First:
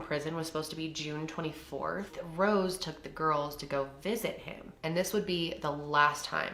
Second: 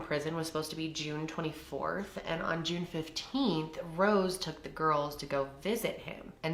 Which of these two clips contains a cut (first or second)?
first